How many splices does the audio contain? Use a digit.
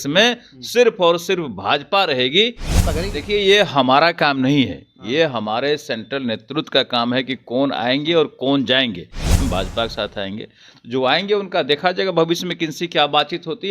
2